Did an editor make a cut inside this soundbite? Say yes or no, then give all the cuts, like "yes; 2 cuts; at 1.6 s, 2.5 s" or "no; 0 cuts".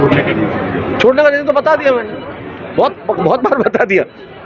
no; 0 cuts